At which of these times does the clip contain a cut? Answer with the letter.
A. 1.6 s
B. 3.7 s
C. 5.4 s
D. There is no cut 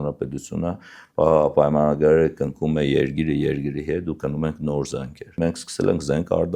C